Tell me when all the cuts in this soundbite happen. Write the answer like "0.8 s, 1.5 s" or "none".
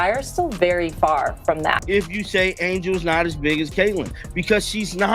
1.8 s